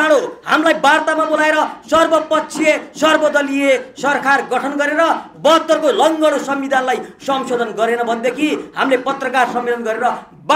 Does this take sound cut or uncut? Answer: uncut